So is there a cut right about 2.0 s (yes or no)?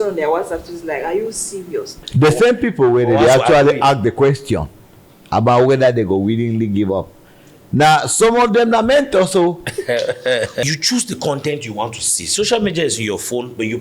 yes